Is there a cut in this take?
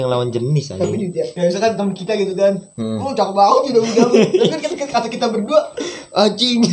yes; 1 cut; at 1.3 s

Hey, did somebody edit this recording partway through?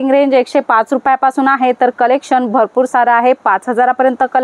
no; 0 cuts

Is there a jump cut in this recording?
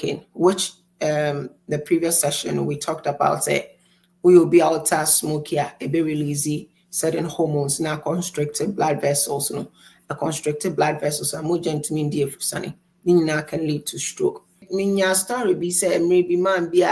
yes; 1 cut; at 14.5 s

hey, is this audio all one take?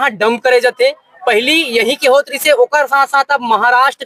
yes; 0 cuts

